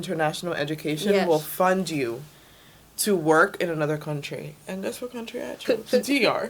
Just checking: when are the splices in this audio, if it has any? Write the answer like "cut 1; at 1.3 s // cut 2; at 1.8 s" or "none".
cut 1; at 5.6 s